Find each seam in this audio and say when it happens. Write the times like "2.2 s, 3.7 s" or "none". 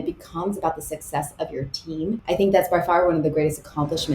2.2 s